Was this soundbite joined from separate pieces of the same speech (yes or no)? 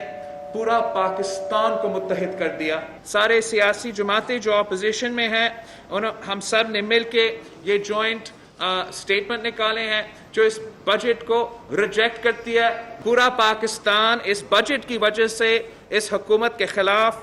yes